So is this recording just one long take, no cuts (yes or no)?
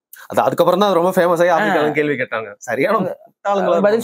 yes